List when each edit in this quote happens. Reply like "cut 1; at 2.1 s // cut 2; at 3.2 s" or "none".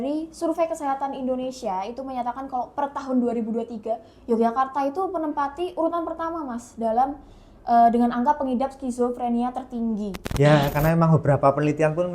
cut 1; at 10.2 s